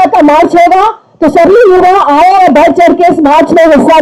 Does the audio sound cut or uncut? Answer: uncut